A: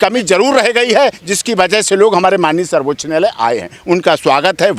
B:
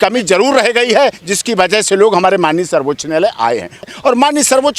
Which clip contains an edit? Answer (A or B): B